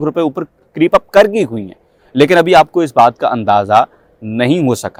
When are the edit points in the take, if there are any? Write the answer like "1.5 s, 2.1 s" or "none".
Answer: none